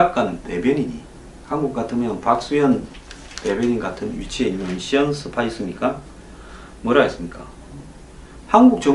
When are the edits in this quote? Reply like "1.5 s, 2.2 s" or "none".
none

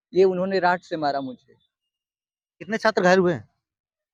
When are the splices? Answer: none

